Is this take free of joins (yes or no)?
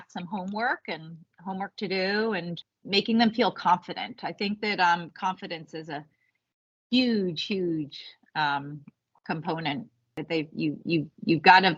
no